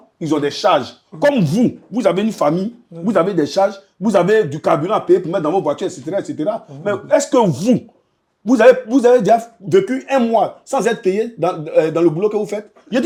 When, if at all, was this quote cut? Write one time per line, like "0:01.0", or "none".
none